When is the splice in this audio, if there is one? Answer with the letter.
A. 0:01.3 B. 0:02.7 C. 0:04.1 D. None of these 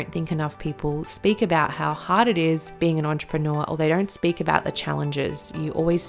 B